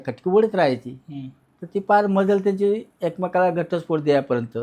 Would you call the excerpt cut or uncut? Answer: uncut